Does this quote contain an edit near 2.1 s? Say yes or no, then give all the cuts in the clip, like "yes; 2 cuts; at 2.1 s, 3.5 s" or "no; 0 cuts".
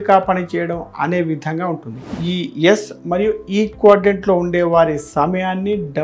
yes; 1 cut; at 2.1 s